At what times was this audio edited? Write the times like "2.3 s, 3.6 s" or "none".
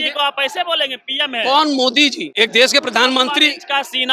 2.2 s